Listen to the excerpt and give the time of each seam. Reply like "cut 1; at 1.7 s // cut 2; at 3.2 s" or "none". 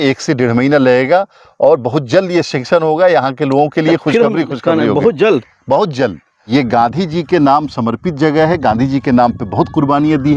cut 1; at 6.3 s